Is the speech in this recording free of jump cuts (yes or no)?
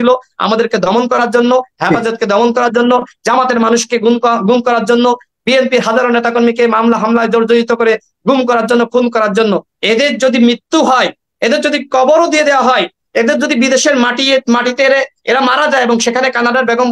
no